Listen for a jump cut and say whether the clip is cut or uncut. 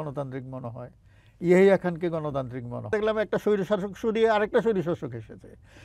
cut